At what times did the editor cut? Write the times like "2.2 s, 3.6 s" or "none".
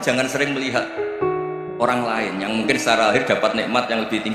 0.9 s, 1.8 s